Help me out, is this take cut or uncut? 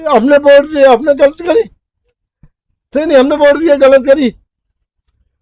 uncut